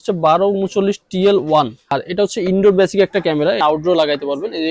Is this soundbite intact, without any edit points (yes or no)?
no